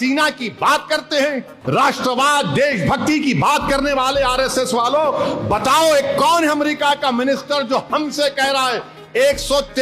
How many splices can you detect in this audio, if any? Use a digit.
1